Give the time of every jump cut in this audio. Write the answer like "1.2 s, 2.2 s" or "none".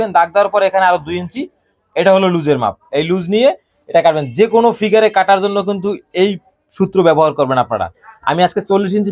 none

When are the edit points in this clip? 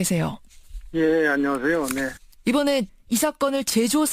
1.2 s

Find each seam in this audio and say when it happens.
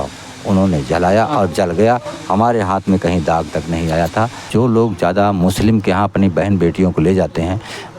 4.5 s

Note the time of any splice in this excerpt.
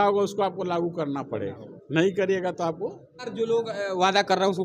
3.2 s

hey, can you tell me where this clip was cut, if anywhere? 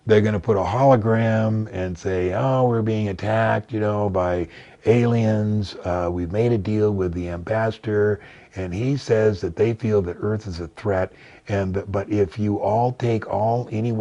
none

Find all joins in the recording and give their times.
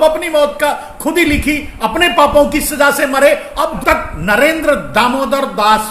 3.8 s

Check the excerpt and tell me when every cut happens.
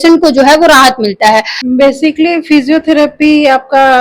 1.6 s

